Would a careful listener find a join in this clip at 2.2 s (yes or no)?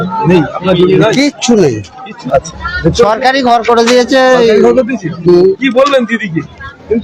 yes